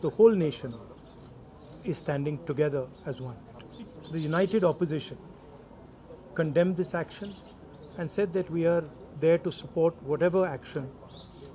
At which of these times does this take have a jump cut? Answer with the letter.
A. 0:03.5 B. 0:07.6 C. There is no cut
A